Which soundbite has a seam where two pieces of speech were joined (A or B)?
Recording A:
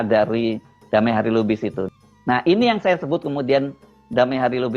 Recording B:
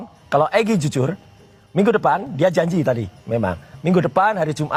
A